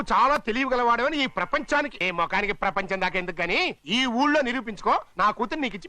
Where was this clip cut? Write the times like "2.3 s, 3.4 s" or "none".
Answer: 2.0 s